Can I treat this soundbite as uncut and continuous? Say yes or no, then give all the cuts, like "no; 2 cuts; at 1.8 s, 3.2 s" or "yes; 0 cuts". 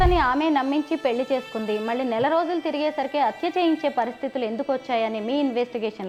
yes; 0 cuts